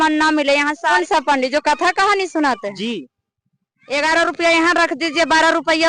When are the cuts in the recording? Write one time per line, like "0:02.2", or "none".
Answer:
0:01.0